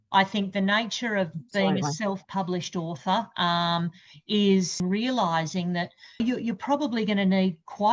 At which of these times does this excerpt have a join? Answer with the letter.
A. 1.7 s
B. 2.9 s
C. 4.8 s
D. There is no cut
C